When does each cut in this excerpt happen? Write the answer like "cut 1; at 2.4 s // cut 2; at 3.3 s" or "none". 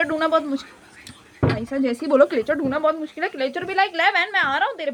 none